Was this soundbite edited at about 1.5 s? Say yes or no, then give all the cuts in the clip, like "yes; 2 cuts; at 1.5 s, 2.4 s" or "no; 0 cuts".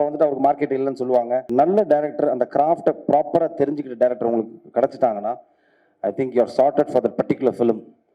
yes; 1 cut; at 1.5 s